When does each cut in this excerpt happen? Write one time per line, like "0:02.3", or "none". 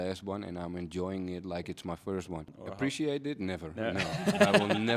0:02.6